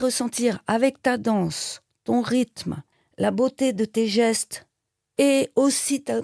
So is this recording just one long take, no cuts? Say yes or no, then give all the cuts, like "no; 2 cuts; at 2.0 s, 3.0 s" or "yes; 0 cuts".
yes; 0 cuts